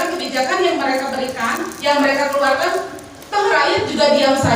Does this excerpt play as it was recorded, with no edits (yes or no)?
yes